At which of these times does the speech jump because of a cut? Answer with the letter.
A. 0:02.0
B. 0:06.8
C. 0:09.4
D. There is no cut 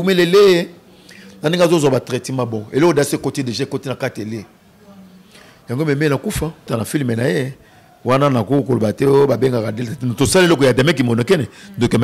B